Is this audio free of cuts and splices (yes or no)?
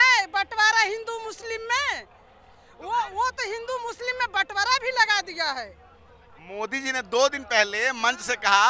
yes